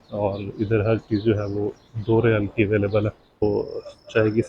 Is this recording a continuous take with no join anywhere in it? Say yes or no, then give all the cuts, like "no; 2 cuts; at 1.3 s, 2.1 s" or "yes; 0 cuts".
no; 1 cut; at 3.4 s